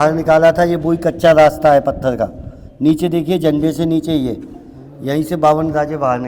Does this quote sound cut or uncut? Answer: uncut